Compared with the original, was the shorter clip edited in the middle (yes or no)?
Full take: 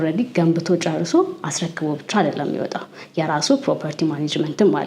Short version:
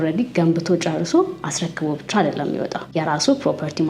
yes